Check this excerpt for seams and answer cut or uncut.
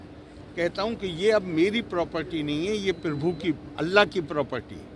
uncut